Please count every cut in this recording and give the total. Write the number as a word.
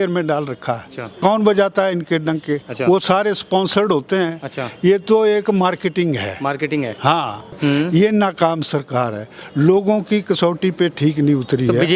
two